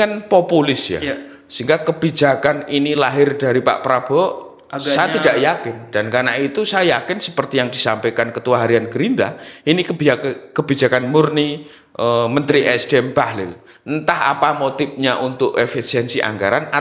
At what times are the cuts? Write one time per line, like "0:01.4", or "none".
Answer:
none